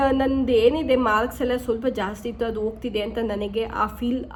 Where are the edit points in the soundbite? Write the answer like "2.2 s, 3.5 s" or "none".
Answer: none